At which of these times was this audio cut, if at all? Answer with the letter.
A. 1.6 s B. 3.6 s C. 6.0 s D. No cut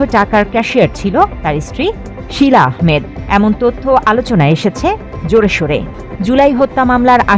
C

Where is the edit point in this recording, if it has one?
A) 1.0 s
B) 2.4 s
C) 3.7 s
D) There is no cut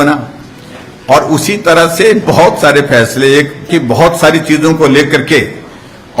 C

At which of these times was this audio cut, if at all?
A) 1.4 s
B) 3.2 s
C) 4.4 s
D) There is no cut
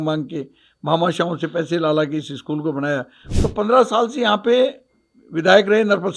B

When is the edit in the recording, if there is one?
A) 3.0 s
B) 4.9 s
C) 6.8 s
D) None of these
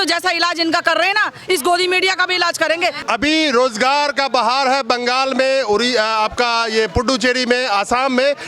A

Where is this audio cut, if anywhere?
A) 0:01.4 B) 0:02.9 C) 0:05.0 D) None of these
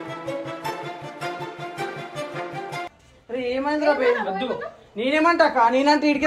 B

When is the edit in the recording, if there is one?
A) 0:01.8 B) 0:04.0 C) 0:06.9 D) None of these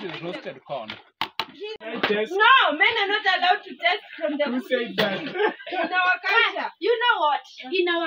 A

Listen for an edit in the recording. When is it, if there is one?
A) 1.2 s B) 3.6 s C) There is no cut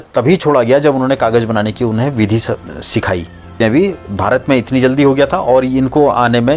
B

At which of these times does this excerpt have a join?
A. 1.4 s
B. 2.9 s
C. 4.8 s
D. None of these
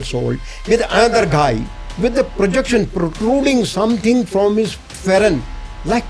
D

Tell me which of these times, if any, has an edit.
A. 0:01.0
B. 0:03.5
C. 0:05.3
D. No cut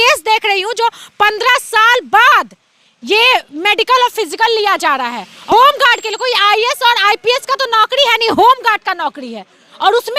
C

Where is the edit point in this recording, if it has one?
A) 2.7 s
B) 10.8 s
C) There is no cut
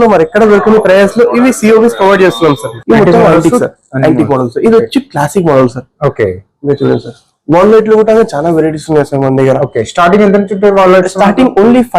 A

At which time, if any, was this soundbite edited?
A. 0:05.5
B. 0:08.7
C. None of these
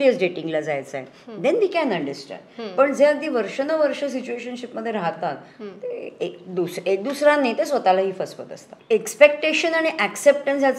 B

